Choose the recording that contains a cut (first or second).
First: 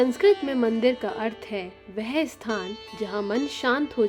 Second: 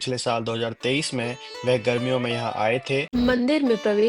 second